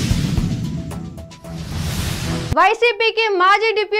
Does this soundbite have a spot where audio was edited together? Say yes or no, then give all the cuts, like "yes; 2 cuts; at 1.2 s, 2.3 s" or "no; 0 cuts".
no; 0 cuts